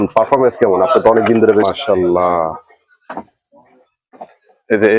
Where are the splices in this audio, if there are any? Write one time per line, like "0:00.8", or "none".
0:01.6